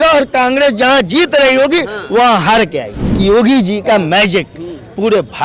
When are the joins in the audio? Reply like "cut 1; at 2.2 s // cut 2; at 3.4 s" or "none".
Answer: cut 1; at 3.1 s